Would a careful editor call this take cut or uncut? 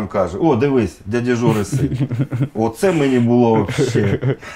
cut